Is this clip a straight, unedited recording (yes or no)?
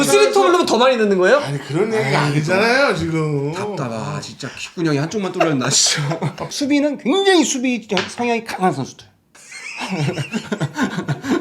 no